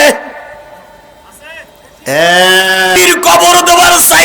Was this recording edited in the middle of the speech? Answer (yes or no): yes